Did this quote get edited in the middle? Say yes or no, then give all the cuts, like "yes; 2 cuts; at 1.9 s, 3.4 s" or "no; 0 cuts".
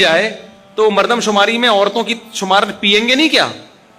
no; 0 cuts